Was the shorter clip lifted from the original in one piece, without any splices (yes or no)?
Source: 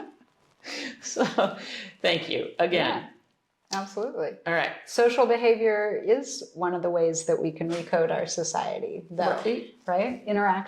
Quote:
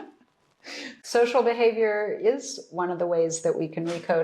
no